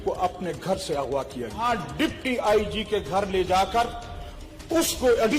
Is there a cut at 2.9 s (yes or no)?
no